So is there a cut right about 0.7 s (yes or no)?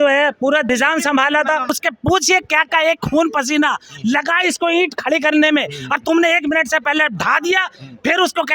yes